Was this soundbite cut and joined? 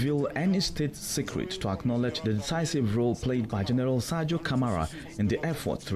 yes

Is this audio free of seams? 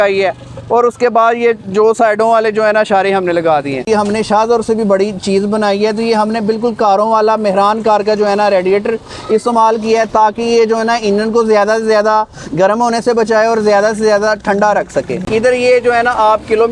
no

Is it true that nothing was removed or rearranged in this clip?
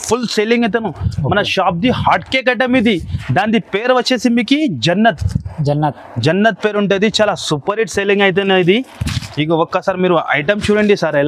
yes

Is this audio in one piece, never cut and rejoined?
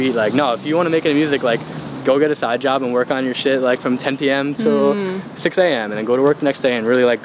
yes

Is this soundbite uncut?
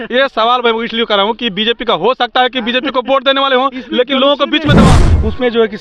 no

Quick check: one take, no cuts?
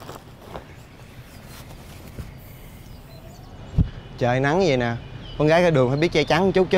yes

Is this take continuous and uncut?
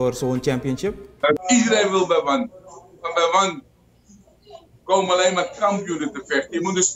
no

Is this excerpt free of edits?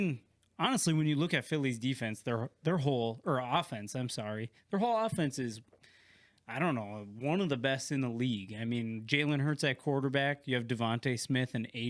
yes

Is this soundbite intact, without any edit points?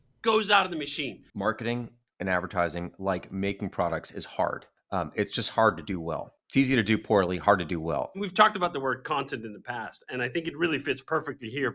no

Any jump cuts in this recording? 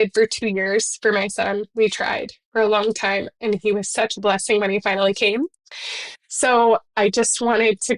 no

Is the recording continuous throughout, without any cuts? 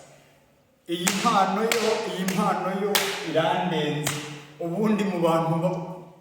yes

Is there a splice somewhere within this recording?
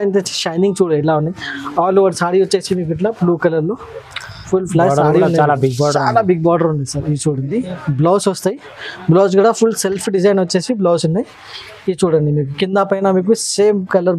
yes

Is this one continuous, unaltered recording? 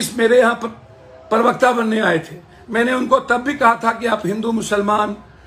yes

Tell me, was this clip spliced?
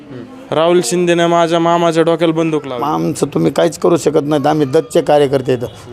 yes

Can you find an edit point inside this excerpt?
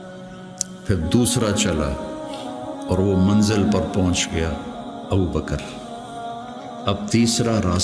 no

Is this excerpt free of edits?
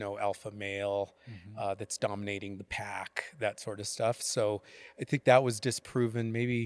yes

